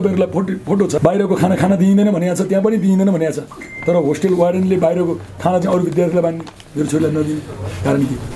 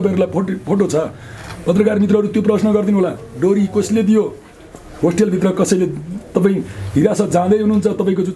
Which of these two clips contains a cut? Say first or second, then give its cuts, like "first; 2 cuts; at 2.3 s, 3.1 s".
first; 1 cut; at 1.0 s